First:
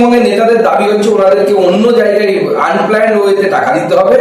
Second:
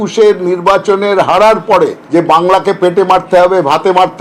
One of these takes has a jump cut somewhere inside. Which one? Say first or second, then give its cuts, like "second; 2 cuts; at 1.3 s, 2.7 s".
second; 1 cut; at 2.0 s